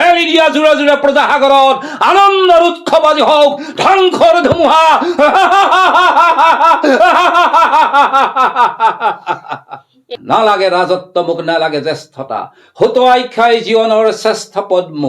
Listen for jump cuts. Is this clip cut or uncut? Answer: cut